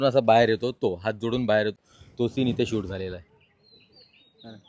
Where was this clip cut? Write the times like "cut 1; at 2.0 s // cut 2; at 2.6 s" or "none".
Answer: cut 1; at 3.2 s